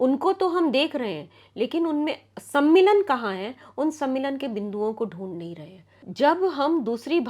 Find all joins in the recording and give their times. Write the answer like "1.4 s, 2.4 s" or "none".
6.0 s